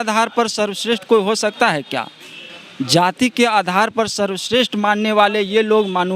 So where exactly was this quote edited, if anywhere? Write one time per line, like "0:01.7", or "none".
none